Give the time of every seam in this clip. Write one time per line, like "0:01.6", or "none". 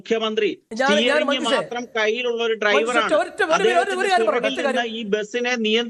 none